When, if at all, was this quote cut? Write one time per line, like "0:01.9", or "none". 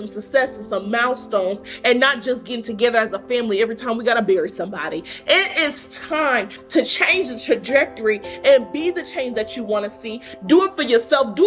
none